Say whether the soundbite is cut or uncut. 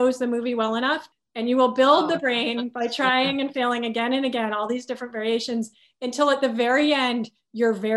cut